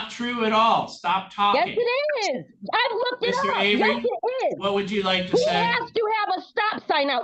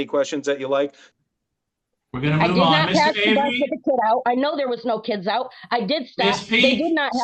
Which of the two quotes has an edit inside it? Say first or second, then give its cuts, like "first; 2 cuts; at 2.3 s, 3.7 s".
second; 1 cut; at 1.0 s